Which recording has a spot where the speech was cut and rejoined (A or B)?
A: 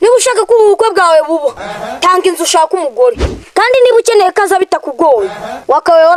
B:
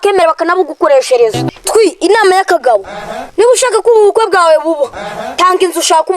B